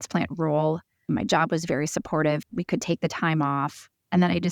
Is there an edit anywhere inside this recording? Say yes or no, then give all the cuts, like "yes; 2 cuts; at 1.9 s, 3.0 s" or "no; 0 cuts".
yes; 2 cuts; at 1.1 s, 2.4 s